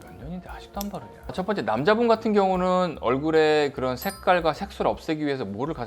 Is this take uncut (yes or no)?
no